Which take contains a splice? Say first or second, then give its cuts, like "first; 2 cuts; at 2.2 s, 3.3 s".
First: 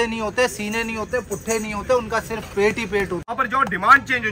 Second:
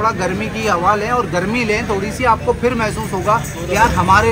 first; 1 cut; at 3.2 s